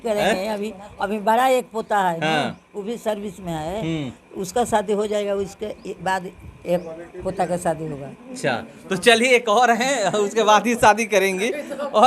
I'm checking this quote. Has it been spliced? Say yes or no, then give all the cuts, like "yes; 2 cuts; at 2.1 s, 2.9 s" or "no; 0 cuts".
no; 0 cuts